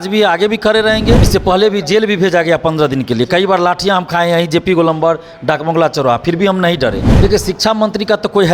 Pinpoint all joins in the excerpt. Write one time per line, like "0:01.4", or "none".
0:01.2
0:07.1

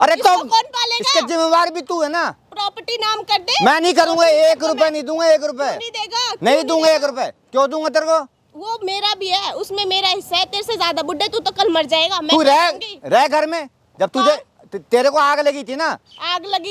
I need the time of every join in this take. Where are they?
none

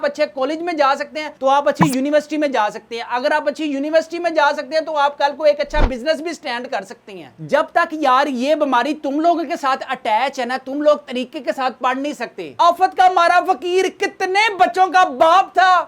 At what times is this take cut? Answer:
0:07.3
0:12.5

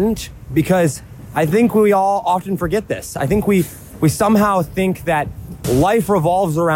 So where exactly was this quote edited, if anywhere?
0:05.6

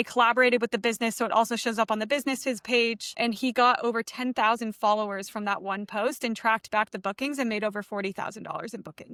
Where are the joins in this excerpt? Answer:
none

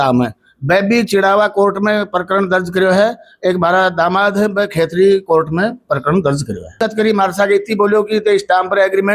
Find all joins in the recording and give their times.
0:06.8

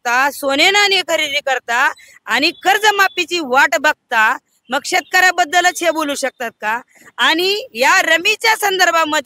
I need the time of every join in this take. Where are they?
none

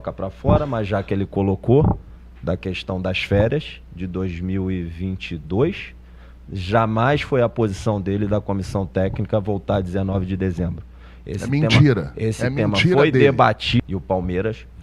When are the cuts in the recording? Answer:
0:13.8

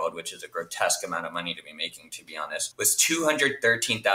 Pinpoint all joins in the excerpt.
0:02.7

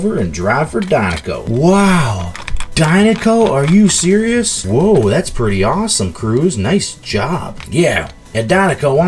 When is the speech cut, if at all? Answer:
none

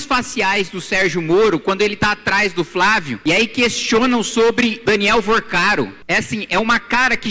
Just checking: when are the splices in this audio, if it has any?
0:03.1
0:04.8
0:06.0

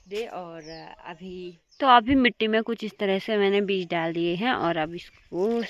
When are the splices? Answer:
0:01.6

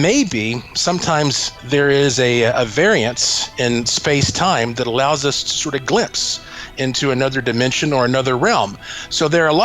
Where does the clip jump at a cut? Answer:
0:01.0

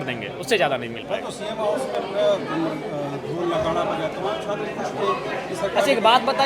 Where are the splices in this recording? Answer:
none

